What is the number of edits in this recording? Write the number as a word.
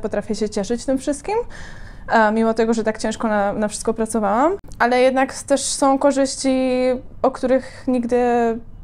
zero